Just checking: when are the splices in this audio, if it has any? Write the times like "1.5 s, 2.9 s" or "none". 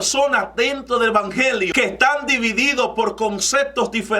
1.7 s